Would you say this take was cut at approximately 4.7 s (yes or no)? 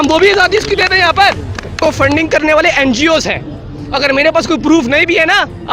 no